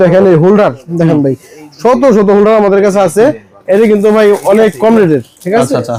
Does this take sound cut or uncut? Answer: uncut